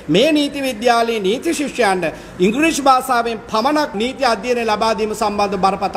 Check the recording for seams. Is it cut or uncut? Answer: cut